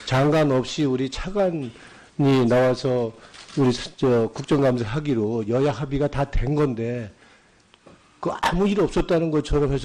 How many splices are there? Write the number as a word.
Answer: one